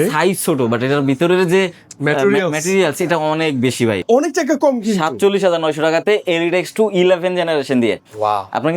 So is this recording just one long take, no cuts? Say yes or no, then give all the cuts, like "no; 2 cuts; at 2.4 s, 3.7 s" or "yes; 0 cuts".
no; 1 cut; at 4.0 s